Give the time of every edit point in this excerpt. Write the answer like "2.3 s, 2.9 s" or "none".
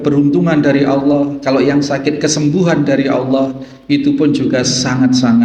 none